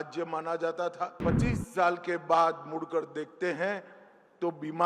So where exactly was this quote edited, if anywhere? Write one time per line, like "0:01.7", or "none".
0:01.2